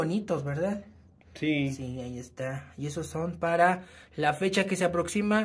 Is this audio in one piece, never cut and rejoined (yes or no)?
yes